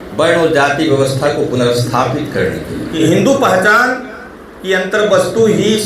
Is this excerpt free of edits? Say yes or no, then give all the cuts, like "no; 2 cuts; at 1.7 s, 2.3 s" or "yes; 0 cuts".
no; 1 cut; at 2.9 s